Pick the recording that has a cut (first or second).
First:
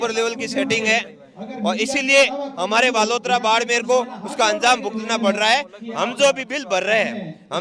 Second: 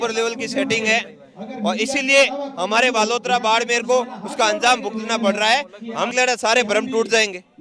second